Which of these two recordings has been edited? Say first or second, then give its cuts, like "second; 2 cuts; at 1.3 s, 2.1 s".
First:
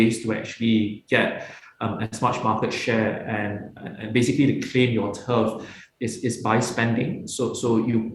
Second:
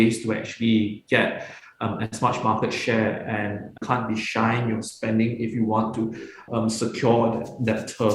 second; 2 cuts; at 3.8 s, 6.4 s